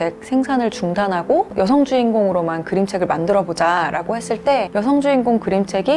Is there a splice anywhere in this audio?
no; 0 cuts

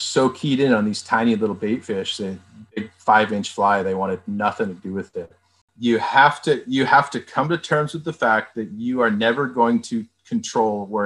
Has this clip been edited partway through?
yes; 1 cut; at 5.8 s

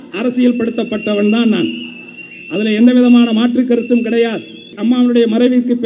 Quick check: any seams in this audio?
yes; 1 cut; at 4.7 s

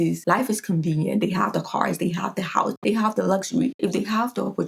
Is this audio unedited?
no; 2 cuts; at 2.8 s, 3.7 s

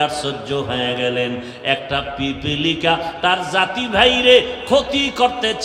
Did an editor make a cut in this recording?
no; 0 cuts

